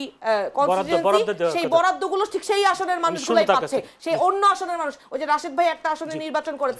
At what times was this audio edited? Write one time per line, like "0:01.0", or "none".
none